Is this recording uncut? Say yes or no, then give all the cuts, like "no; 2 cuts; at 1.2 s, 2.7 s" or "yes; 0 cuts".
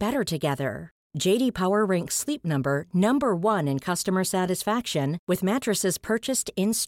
yes; 0 cuts